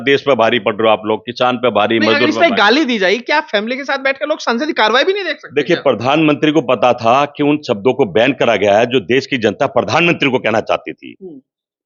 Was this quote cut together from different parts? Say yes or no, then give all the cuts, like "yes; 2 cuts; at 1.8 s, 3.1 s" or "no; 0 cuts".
no; 0 cuts